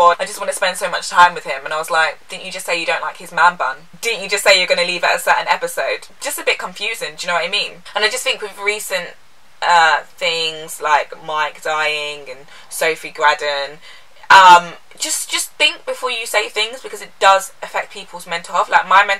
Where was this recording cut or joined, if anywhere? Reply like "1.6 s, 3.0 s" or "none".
7.7 s